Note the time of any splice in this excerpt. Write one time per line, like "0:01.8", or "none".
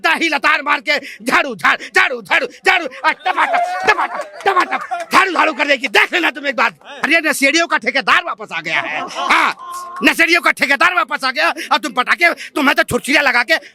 0:07.0